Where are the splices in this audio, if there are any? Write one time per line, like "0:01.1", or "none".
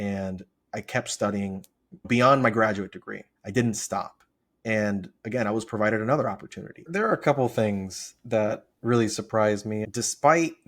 0:03.4
0:06.9
0:09.9